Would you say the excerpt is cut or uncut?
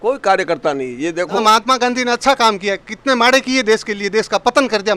cut